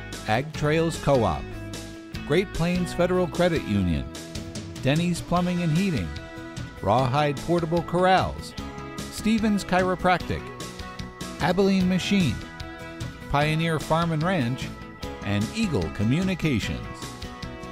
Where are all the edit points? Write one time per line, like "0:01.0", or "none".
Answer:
0:16.7